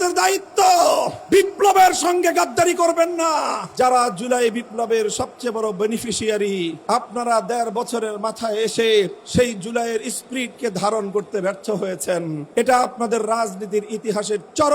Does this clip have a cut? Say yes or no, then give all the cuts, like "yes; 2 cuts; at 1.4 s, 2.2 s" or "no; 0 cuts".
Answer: yes; 5 cuts; at 1.2 s, 3.6 s, 6.8 s, 9.2 s, 12.4 s